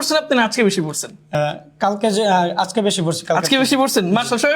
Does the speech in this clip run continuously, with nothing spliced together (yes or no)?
no